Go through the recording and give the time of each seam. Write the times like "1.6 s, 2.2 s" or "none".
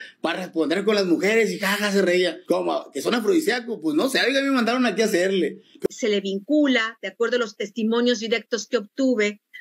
5.9 s